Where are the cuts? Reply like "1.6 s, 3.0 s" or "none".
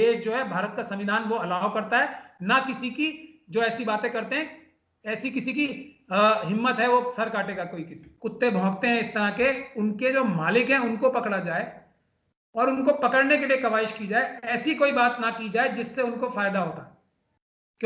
8.1 s